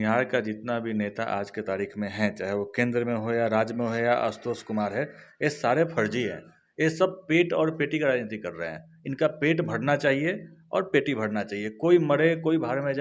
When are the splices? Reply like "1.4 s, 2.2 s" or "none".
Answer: none

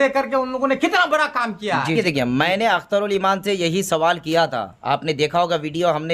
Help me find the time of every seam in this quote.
1.9 s

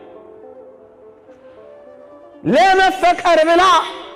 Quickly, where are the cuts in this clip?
none

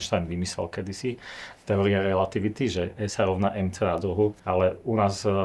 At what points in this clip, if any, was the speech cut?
4.4 s

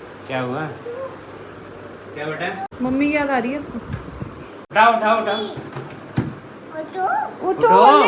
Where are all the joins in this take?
2.7 s, 4.6 s

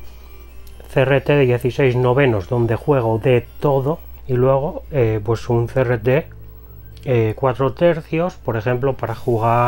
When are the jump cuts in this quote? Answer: 4.1 s

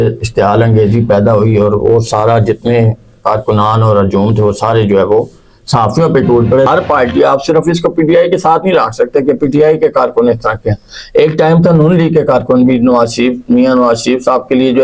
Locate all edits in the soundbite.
6.7 s

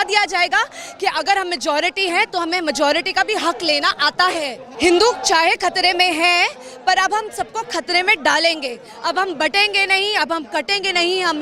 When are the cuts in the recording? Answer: 4.7 s

